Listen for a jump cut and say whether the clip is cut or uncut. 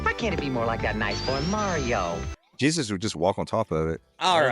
cut